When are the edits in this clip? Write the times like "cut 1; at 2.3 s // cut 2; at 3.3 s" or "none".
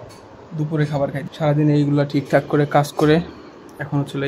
cut 1; at 1.3 s